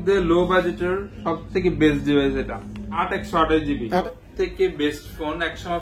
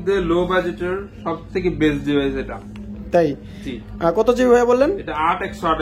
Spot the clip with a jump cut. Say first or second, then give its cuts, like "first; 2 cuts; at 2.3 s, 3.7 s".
first; 2 cuts; at 2.9 s, 4.0 s